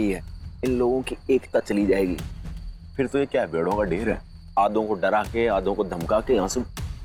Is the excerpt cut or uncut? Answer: uncut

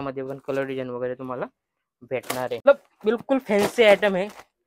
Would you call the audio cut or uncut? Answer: cut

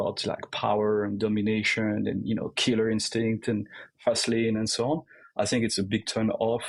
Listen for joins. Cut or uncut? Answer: uncut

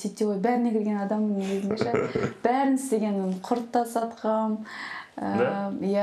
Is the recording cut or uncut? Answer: uncut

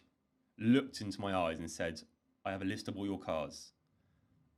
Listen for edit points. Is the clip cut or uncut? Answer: uncut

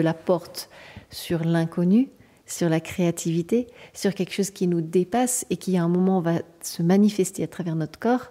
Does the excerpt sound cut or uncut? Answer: uncut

